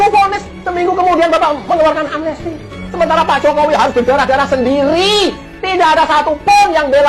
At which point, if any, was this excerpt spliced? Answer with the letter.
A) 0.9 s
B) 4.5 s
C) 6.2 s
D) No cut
D